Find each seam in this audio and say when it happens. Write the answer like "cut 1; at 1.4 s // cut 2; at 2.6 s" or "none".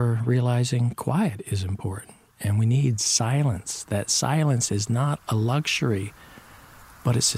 none

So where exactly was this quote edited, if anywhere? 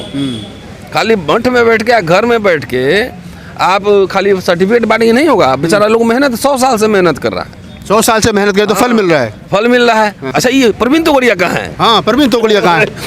cut 1; at 10.3 s

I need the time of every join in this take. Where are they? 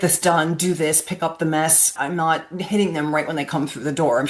cut 1; at 1.9 s

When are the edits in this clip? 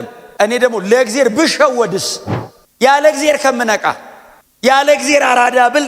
none

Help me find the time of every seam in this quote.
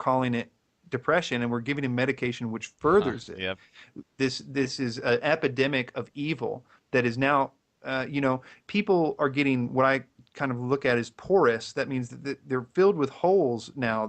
cut 1; at 2.3 s

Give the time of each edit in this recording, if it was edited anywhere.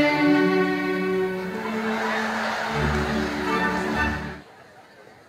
cut 1; at 4.2 s

